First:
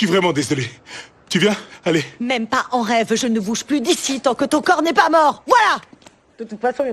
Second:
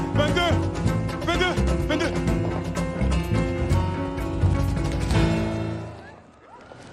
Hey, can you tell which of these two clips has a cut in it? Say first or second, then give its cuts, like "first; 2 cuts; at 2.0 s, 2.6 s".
first; 2 cuts; at 3.1 s, 5.4 s